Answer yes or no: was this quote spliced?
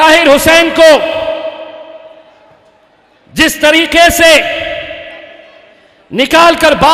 no